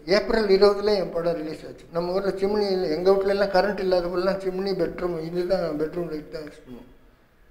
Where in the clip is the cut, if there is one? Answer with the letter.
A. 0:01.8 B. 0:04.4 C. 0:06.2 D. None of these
A